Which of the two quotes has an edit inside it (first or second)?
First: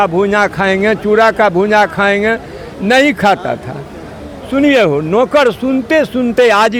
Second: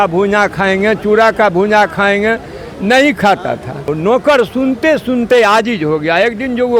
second